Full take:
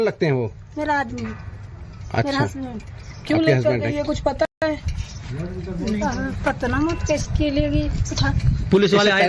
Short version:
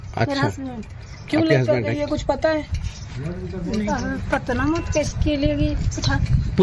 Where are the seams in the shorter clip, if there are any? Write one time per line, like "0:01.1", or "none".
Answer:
0:02.5